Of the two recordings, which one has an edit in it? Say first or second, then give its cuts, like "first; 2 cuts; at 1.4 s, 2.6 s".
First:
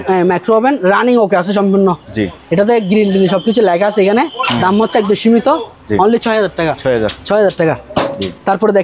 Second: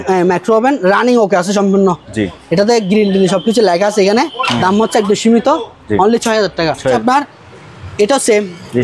second; 1 cut; at 7.0 s